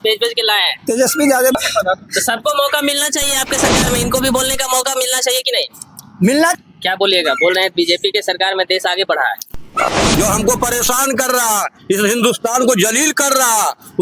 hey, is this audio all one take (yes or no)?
no